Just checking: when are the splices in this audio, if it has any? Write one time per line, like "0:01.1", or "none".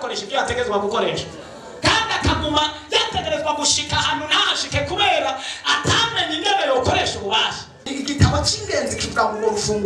0:07.9